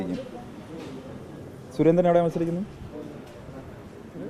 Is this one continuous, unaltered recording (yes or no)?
yes